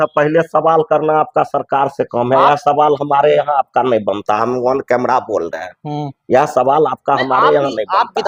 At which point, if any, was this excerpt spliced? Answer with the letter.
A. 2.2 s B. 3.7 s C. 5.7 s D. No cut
D